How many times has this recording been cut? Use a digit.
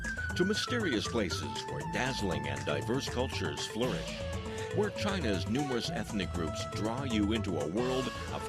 1